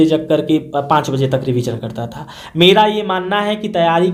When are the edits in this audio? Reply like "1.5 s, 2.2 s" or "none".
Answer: none